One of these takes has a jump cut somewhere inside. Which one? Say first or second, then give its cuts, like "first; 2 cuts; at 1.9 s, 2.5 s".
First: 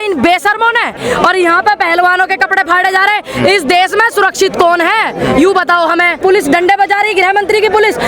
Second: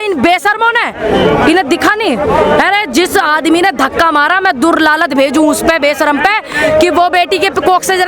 first; 2 cuts; at 0.9 s, 6.2 s